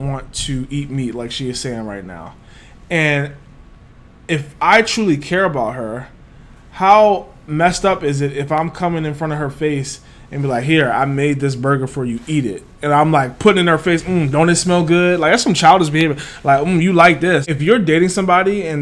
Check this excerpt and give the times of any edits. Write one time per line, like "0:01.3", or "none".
0:17.5